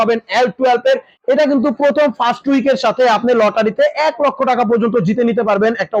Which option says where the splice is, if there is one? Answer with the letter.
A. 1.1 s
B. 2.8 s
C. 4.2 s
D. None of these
A